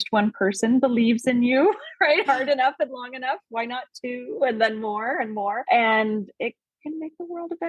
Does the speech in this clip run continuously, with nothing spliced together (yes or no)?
no